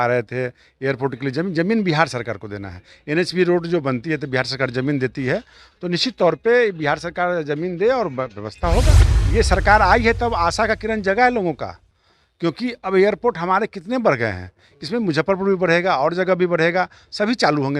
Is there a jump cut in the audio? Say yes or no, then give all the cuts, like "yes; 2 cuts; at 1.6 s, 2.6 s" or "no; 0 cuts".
yes; 1 cut; at 9.0 s